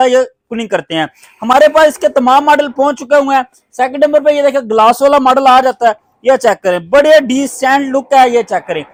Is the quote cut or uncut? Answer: uncut